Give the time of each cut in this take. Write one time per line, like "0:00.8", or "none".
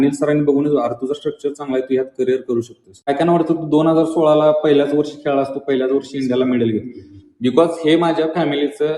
0:03.1